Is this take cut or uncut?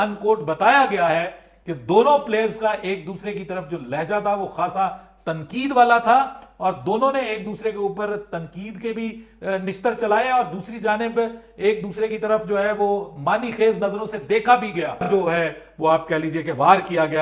cut